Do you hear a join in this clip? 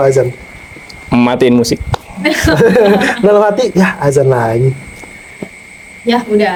no; 0 cuts

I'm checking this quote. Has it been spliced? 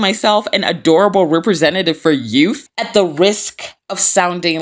yes; 1 cut; at 2.7 s

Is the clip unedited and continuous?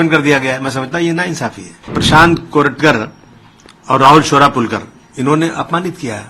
no; 1 cut; at 2.0 s

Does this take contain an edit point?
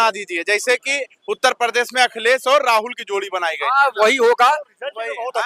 no; 0 cuts

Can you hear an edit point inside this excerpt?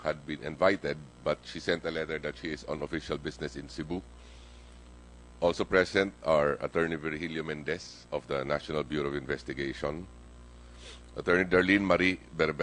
no; 0 cuts

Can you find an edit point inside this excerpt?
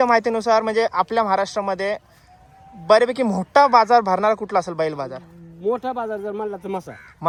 no; 0 cuts

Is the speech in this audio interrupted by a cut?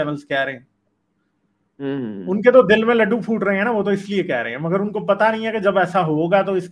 no; 0 cuts

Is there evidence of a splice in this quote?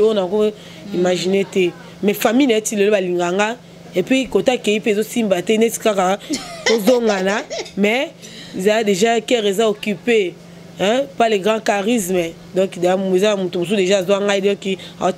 no; 0 cuts

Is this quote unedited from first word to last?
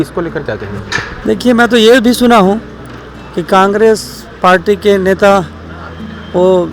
no; 1 cut; at 1.1 s

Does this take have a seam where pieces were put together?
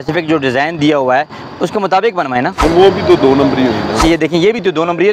yes; 2 cuts; at 2.5 s, 4.0 s

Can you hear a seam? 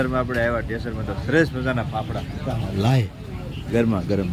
no; 0 cuts

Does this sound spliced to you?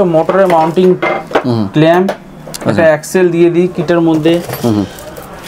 no; 0 cuts

